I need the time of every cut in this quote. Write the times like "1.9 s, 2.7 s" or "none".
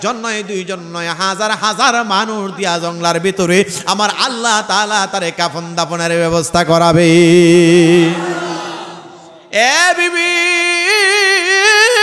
none